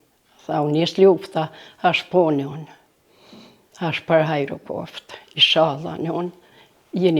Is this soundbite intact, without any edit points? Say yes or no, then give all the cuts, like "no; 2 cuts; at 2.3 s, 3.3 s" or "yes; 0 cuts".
yes; 0 cuts